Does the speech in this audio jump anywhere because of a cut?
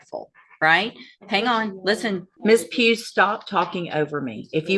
yes; 1 cut; at 2.3 s

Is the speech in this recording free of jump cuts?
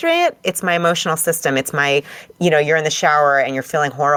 yes; 0 cuts

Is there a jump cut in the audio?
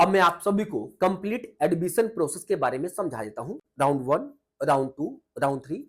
no; 0 cuts

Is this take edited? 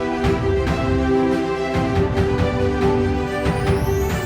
yes; 1 cut; at 3.0 s

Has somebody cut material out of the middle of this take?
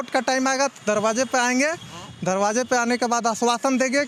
no; 0 cuts

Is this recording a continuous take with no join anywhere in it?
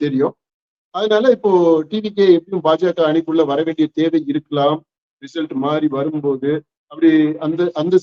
yes; 0 cuts

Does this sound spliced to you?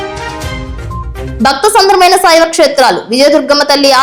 no; 0 cuts

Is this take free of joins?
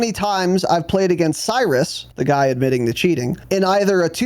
no; 2 cuts; at 2.0 s, 3.3 s

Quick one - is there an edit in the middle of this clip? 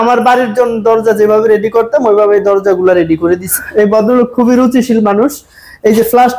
yes; 1 cut; at 3.5 s

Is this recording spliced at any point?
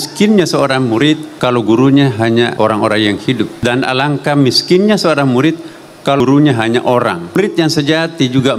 yes; 5 cuts; at 1.3 s, 2.5 s, 3.5 s, 6.2 s, 7.4 s

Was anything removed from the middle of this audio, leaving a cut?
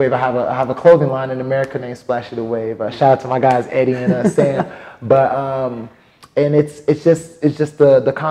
no; 0 cuts

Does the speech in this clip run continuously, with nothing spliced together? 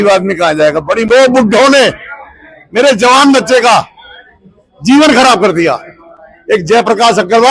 no; 1 cut; at 1.0 s

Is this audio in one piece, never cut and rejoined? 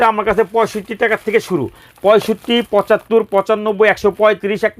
yes; 0 cuts

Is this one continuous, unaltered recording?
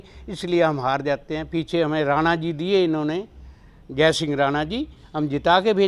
yes; 0 cuts

